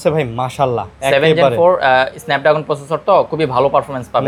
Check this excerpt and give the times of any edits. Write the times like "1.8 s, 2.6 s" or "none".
none